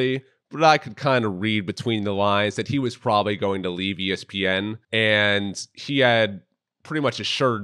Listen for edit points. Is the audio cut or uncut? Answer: cut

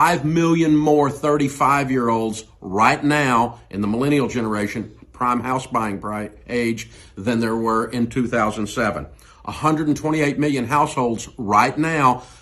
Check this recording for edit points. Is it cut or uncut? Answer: cut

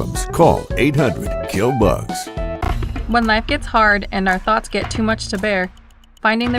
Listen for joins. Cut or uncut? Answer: cut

